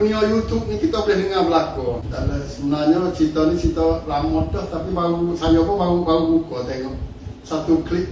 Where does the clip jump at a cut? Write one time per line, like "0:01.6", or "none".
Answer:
0:02.1